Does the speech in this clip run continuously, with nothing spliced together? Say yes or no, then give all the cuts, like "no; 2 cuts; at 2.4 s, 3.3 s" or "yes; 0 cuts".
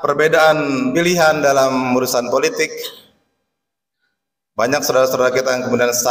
no; 1 cut; at 0.9 s